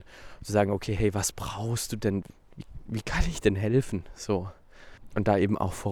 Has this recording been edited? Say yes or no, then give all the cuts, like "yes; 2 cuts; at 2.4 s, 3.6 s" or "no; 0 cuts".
yes; 2 cuts; at 2.3 s, 5.0 s